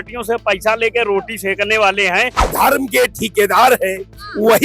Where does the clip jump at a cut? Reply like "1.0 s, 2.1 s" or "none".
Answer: 2.4 s